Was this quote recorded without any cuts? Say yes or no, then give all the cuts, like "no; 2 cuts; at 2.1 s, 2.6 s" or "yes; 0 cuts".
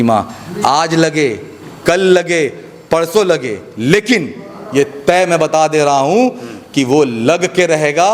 yes; 0 cuts